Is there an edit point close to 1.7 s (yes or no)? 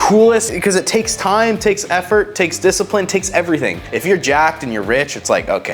no